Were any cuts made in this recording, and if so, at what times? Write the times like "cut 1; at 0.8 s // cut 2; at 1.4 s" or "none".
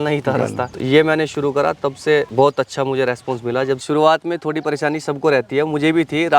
cut 1; at 2.3 s // cut 2; at 3.8 s